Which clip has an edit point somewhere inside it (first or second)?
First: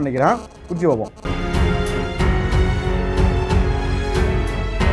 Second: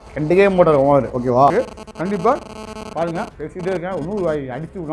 second